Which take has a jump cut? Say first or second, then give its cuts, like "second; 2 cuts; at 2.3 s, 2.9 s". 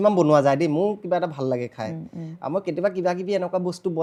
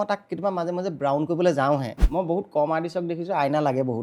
second; 1 cut; at 2.0 s